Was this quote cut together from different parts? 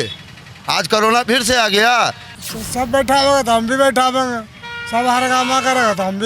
yes; 1 cut; at 2.2 s

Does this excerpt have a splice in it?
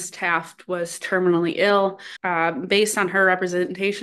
yes; 1 cut; at 2.4 s

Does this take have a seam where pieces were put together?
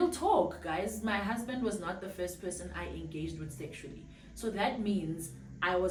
no; 0 cuts

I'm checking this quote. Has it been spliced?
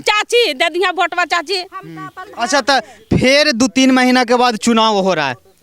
no; 0 cuts

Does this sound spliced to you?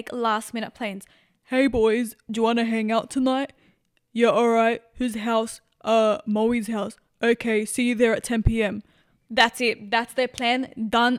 no; 0 cuts

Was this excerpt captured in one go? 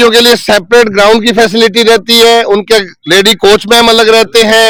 yes; 0 cuts

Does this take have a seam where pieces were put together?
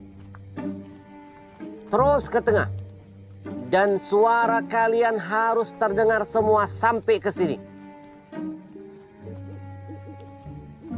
yes; 2 cuts; at 1.8 s, 9.3 s

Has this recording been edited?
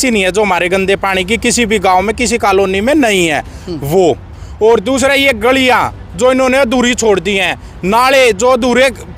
no; 0 cuts

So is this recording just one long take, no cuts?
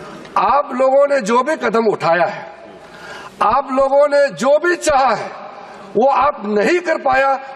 yes; 0 cuts

